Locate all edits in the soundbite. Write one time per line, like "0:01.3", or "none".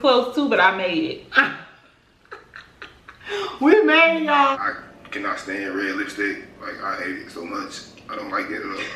0:04.5